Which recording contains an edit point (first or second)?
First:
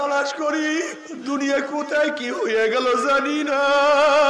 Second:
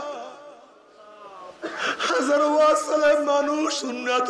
first